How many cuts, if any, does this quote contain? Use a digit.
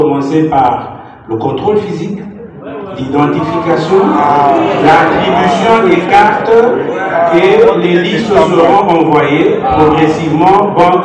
0